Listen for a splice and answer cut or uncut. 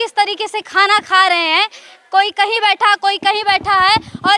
uncut